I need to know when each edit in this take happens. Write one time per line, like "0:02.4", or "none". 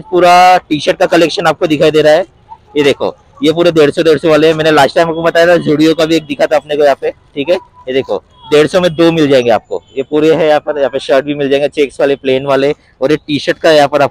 none